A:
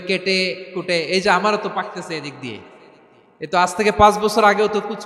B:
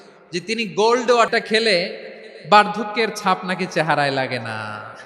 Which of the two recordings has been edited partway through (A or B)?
B